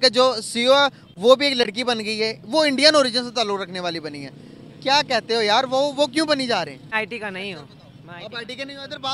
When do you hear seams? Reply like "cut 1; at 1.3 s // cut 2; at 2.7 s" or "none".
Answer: cut 1; at 6.9 s